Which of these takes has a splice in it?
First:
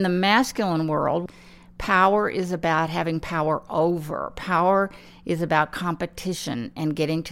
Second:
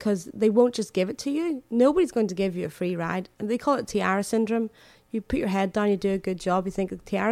first; 1 cut; at 1.2 s

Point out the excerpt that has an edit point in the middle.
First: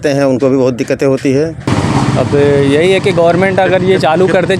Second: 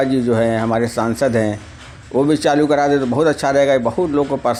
first; 1 cut; at 1.6 s

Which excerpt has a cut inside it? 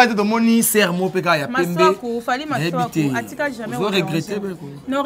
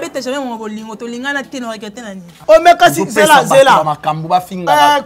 second; 1 cut; at 2.3 s

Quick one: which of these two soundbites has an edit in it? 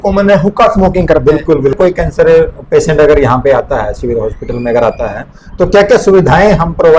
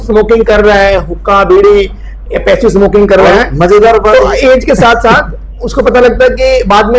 first; 1 cut; at 1.8 s

